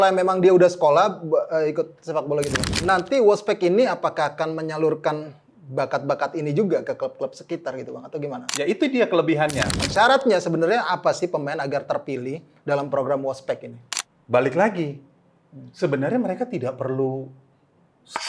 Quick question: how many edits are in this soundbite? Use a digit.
2